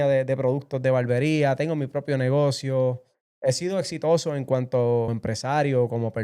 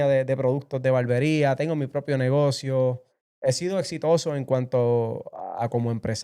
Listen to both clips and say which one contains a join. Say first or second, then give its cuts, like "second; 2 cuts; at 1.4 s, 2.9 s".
first; 1 cut; at 5.1 s